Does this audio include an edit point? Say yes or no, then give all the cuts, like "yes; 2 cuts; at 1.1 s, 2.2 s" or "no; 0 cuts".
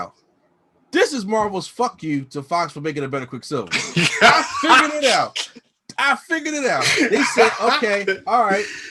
no; 0 cuts